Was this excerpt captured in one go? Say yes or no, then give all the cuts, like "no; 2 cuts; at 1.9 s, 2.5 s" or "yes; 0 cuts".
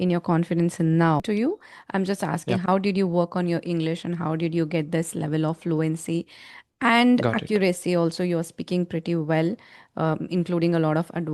no; 1 cut; at 1.2 s